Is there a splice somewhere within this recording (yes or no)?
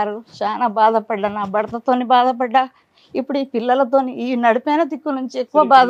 no